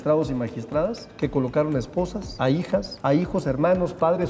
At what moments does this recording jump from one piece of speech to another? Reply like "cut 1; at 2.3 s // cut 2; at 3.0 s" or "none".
cut 1; at 1.0 s // cut 2; at 2.7 s